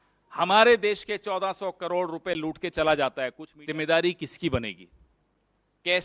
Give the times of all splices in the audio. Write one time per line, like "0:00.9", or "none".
0:03.5